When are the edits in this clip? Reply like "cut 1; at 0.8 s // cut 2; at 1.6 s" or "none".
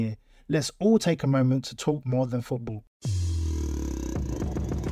cut 1; at 3.0 s